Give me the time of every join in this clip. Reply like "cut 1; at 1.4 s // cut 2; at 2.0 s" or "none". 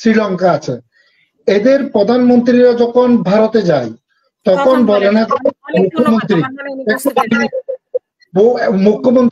none

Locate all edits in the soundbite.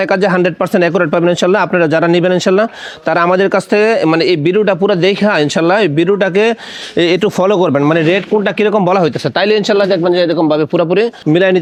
none

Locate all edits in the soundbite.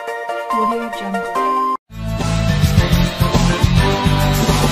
cut 1; at 1.9 s

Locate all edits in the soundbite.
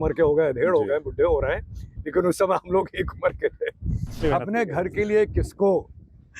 cut 1; at 4.2 s

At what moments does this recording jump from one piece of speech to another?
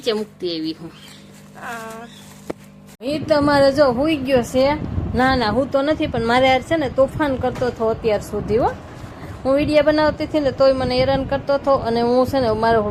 none

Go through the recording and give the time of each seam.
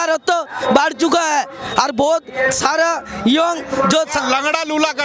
none

